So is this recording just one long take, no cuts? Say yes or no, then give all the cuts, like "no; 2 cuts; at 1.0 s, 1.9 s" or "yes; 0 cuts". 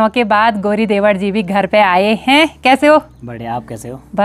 yes; 0 cuts